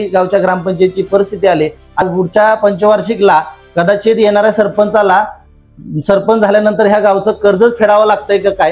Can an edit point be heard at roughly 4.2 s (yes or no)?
no